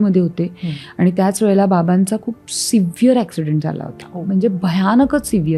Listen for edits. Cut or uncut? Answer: uncut